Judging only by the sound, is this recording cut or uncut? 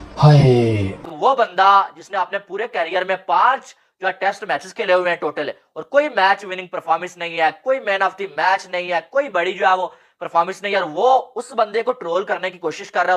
cut